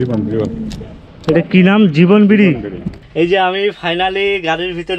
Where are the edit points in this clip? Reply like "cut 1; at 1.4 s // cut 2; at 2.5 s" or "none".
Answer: cut 1; at 3.0 s